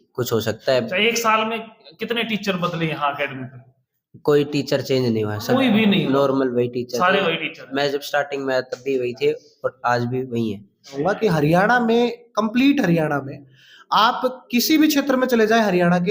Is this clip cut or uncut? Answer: cut